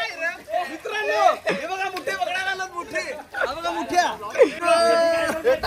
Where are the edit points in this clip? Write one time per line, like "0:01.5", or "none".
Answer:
0:04.6